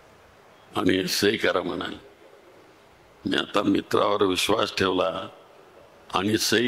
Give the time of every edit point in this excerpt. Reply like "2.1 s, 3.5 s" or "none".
none

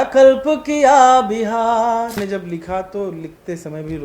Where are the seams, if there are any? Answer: 2.2 s

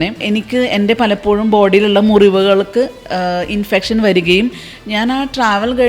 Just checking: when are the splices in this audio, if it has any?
none

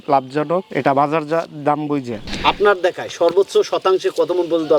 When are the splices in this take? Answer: 2.2 s

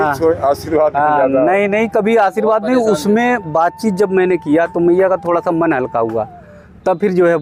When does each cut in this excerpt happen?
none

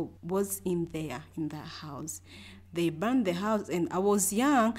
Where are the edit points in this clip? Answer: none

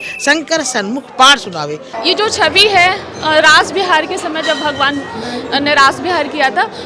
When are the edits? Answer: 1.9 s

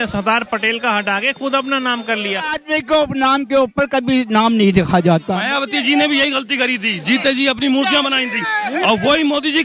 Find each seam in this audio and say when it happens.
2.6 s, 5.3 s

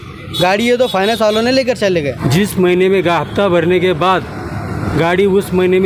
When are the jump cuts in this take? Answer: 2.2 s

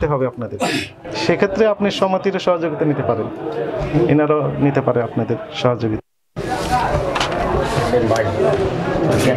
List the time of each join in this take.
none

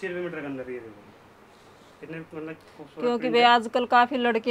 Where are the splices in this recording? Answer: none

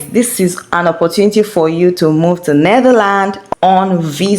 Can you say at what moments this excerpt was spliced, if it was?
3.4 s

